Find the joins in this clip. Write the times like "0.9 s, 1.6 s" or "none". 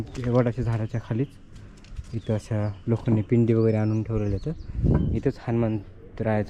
none